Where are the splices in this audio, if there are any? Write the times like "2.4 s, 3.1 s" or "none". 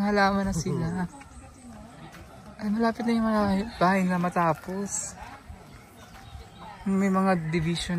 none